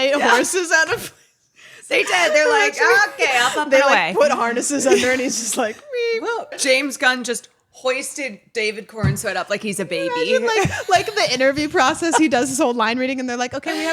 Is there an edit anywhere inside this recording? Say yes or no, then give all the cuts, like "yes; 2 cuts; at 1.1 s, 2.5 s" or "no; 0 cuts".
yes; 1 cut; at 6.6 s